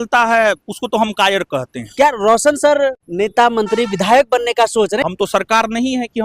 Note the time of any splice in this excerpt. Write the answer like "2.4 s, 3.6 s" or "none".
1.8 s, 3.0 s, 5.1 s